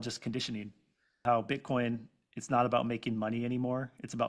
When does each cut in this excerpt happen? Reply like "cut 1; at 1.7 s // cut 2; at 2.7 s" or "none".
cut 1; at 1.2 s